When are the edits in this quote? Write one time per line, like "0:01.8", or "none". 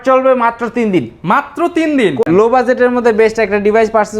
0:02.2